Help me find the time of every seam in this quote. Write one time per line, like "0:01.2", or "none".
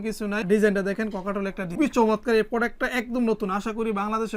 none